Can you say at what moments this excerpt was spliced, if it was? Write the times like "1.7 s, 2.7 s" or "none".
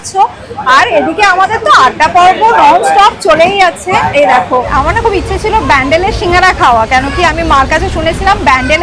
4.7 s